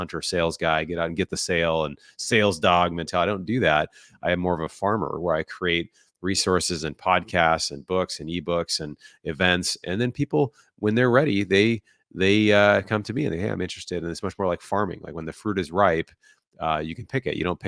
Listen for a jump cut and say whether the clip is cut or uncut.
uncut